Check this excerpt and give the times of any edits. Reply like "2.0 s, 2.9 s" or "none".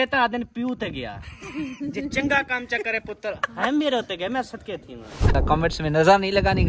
5.3 s